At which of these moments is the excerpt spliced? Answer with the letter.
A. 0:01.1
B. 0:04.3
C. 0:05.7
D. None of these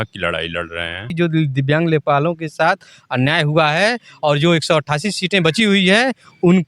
A